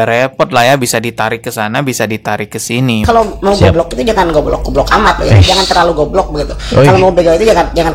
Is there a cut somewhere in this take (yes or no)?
yes